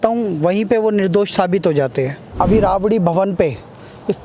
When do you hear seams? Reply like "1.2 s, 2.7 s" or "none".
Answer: 2.3 s